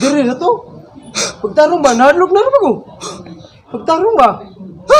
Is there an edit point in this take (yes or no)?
no